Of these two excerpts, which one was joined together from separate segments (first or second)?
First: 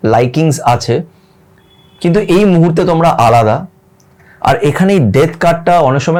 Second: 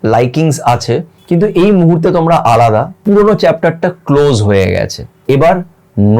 second